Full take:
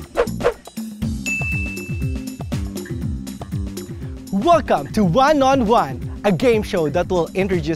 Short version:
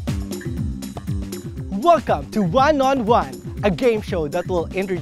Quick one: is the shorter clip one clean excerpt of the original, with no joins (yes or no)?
no